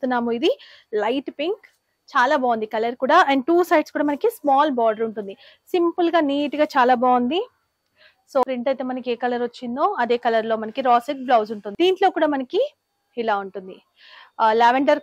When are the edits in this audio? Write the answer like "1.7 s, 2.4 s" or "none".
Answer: 8.4 s, 11.6 s